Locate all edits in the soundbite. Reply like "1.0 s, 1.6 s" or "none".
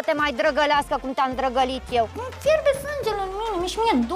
2.2 s